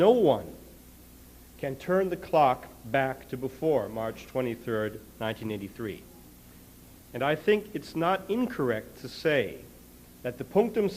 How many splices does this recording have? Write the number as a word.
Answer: one